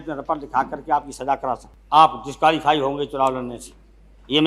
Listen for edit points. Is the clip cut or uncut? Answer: cut